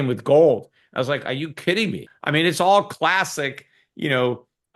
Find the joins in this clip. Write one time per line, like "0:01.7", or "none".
0:02.0